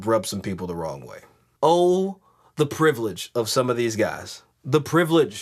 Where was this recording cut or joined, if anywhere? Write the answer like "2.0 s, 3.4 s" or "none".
1.5 s